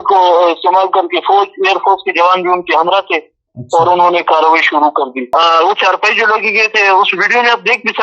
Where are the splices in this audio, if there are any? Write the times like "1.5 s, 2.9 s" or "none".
5.2 s